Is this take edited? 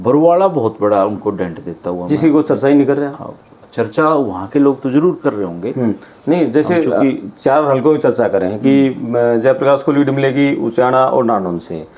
no; 0 cuts

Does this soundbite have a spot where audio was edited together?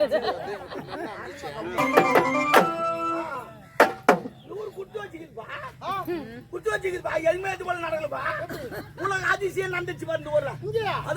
yes; 1 cut; at 1.8 s

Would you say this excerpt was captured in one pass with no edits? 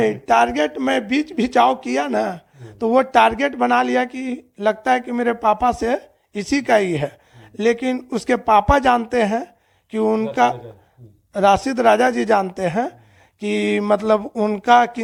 yes; 0 cuts

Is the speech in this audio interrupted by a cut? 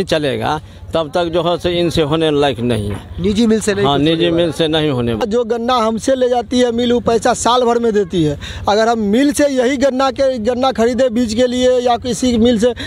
yes; 1 cut; at 5.2 s

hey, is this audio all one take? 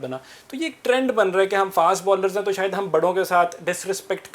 yes; 0 cuts

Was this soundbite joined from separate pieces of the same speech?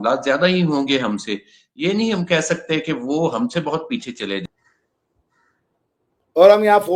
yes; 1 cut; at 4.5 s

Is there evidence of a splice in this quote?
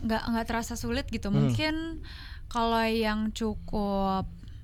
no; 0 cuts

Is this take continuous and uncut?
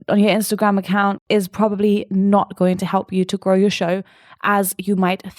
no; 1 cut; at 1.2 s

